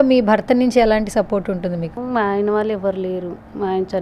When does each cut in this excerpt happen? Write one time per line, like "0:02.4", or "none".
0:01.9